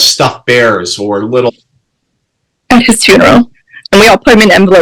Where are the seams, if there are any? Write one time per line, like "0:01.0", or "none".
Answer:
0:01.5